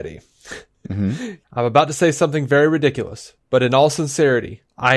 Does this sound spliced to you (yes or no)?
yes